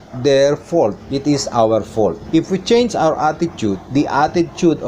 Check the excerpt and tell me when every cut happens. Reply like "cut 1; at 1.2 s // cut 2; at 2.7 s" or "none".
cut 1; at 1.1 s // cut 2; at 2.2 s // cut 3; at 3.8 s